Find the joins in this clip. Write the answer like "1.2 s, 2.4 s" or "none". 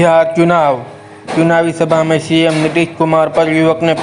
none